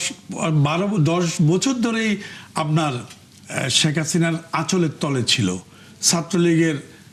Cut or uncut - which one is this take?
uncut